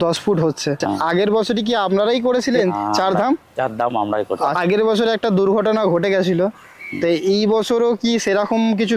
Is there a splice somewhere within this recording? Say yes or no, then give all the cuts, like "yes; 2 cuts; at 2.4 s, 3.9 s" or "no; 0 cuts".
yes; 3 cuts; at 1.3 s, 2.7 s, 4.5 s